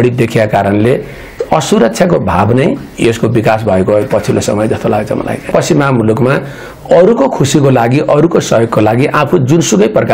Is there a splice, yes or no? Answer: yes